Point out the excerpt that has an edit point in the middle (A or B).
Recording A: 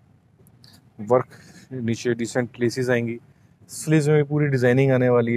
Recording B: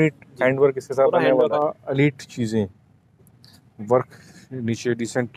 B